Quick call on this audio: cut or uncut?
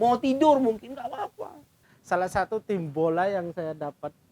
cut